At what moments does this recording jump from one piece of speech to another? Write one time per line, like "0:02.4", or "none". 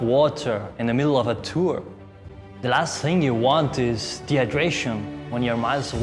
0:02.2